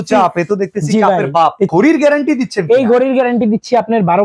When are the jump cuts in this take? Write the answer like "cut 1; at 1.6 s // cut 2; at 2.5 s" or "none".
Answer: cut 1; at 1.7 s